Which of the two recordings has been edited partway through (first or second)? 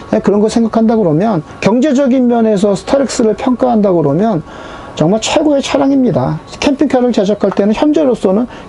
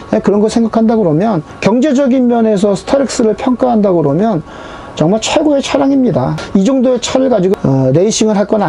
first